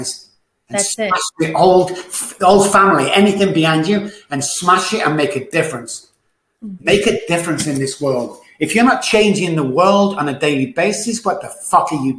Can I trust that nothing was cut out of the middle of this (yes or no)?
yes